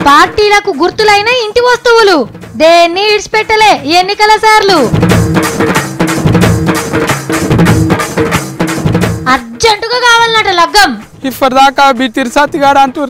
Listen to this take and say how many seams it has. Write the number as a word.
one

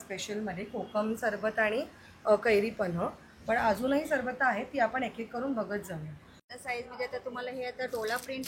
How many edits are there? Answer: one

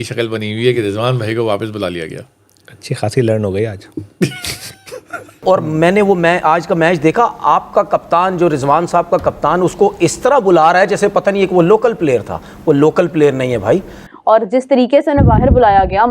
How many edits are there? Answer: two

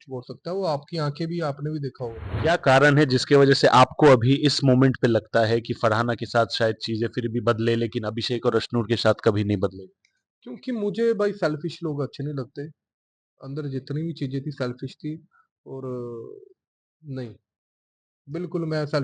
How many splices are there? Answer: one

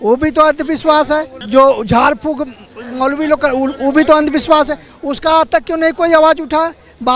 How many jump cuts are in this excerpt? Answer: one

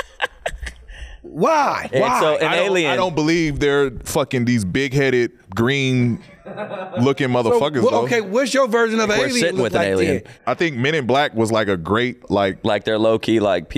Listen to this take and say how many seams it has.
three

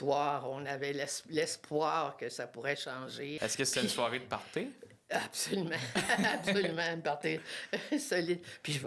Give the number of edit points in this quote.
one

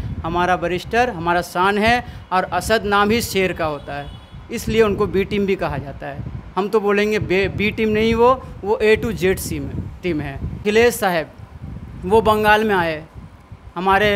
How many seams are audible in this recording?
one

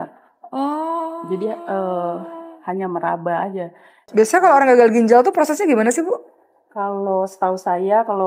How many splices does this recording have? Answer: one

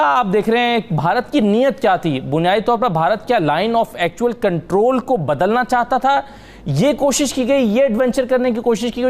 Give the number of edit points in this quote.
zero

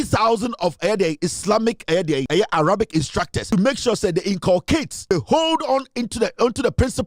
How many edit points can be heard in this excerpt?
three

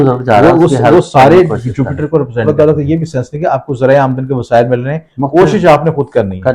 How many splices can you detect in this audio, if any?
one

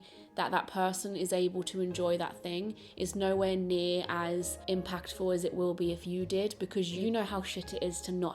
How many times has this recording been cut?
two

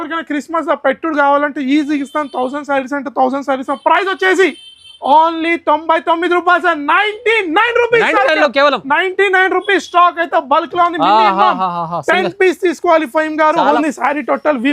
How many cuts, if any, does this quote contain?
one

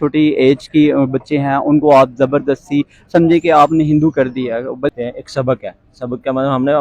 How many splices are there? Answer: one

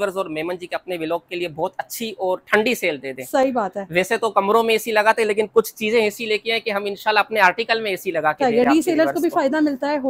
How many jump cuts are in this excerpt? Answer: zero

